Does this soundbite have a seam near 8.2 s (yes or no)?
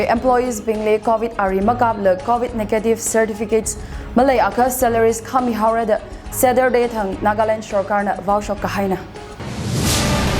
no